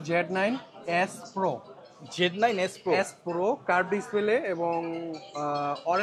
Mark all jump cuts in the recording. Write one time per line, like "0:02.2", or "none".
none